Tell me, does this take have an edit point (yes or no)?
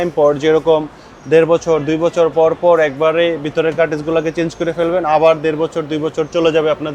no